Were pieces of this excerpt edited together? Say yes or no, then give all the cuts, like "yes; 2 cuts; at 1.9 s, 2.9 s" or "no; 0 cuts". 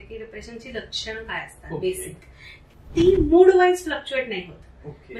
yes; 1 cut; at 2.8 s